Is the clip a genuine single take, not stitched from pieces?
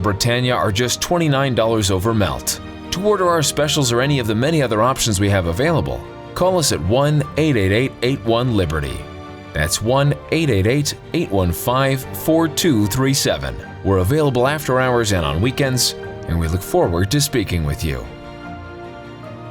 yes; 0 cuts

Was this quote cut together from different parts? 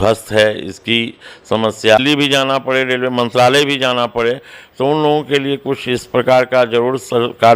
yes; 1 cut; at 2.0 s

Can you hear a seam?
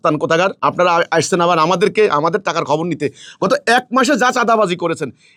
no; 0 cuts

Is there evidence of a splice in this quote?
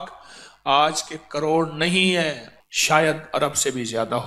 yes; 1 cut; at 2.5 s

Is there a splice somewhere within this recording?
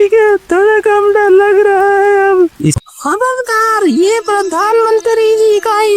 yes; 1 cut; at 2.8 s

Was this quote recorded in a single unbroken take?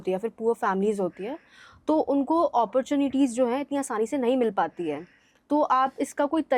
yes; 0 cuts

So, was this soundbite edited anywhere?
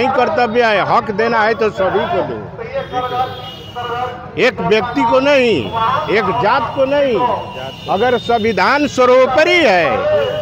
no; 0 cuts

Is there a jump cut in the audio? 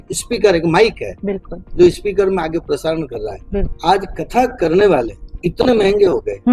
yes; 1 cut; at 3.7 s

